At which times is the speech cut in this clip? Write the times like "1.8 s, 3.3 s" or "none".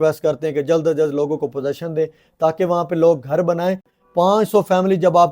3.9 s